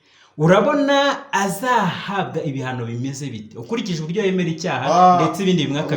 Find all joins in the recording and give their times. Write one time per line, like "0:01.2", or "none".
none